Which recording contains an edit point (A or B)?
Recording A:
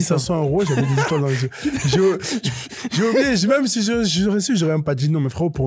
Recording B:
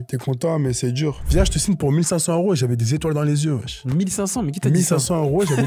B